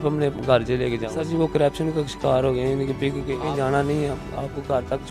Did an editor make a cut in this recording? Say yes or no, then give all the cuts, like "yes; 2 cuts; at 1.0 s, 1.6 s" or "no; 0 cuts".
yes; 2 cuts; at 1.1 s, 3.4 s